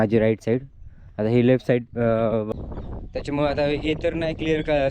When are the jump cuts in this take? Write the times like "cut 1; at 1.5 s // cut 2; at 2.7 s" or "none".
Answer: cut 1; at 2.5 s